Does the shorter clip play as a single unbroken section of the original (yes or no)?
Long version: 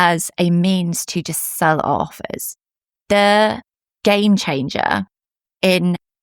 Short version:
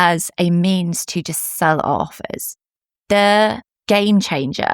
no